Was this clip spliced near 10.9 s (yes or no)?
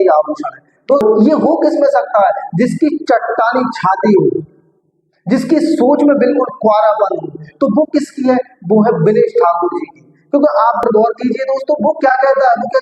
yes